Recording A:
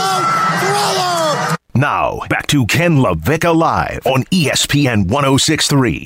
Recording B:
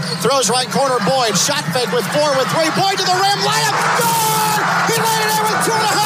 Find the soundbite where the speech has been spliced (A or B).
A